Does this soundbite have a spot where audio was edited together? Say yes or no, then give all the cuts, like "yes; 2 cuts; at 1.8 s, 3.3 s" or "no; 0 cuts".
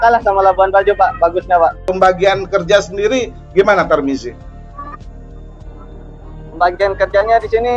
yes; 1 cut; at 1.9 s